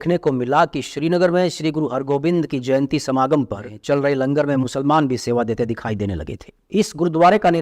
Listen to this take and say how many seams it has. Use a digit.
1